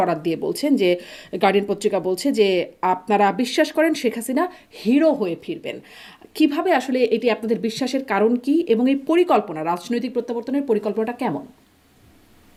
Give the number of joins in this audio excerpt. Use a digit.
0